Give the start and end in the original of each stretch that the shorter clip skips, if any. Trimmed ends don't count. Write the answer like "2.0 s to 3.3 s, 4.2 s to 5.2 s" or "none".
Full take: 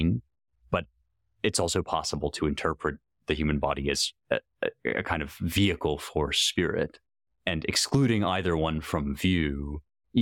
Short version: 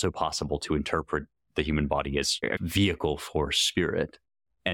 4.2 s to 5.3 s